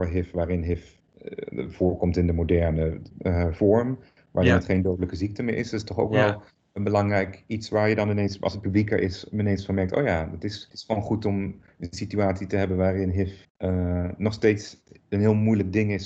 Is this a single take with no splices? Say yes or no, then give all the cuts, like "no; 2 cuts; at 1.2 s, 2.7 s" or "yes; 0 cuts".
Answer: no; 4 cuts; at 1.0 s, 3.1 s, 10.6 s, 13.4 s